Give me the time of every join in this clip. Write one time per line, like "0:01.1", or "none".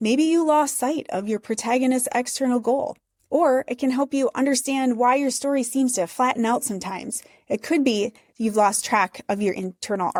none